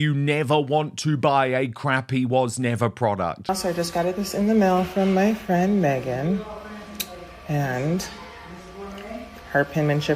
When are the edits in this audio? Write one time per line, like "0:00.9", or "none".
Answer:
0:03.5